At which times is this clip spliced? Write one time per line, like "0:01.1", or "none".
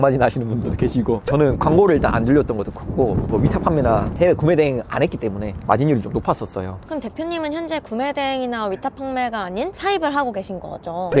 none